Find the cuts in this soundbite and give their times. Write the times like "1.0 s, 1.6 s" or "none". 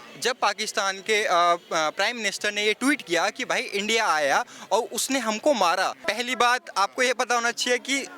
6.0 s